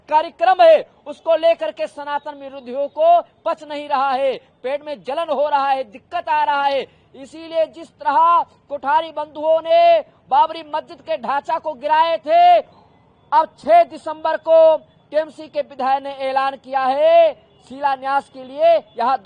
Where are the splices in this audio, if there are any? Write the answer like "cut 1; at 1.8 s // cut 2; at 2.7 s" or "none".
none